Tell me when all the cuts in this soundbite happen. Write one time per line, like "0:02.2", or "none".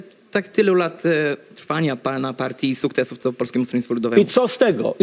none